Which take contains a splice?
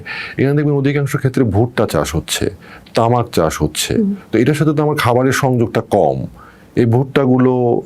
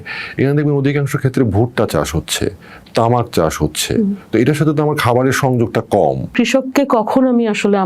second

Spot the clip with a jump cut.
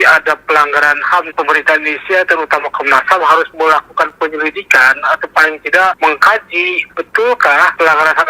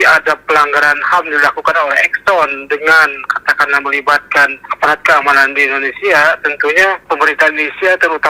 first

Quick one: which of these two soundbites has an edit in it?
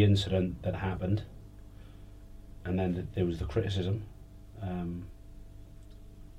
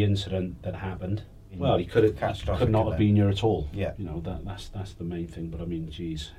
second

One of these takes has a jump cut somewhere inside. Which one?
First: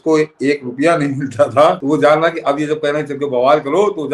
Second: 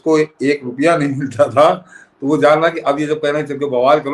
first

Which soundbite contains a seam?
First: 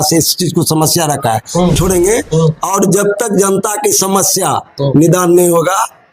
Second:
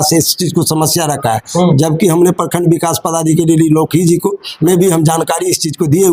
first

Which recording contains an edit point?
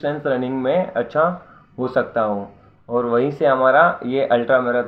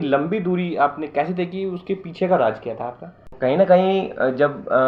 second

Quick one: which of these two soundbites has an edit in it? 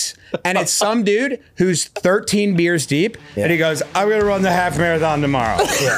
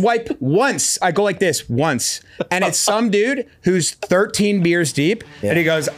second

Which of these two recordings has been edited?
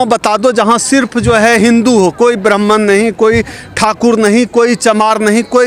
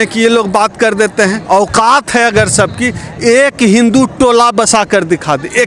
second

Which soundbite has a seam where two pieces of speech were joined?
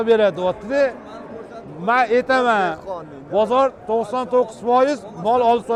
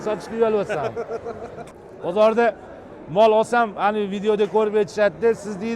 second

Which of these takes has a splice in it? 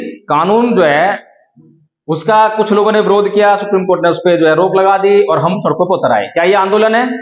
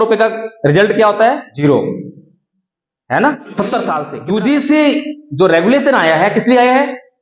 second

